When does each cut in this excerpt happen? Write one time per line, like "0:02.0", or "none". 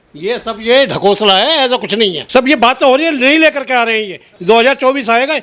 0:02.2
0:04.2